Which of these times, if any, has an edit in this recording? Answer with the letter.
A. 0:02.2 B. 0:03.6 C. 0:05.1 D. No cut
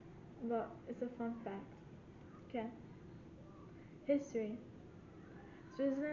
A